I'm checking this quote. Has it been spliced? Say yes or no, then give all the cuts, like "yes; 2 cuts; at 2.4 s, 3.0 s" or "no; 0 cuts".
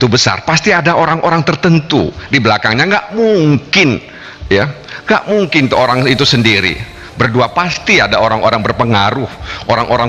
no; 0 cuts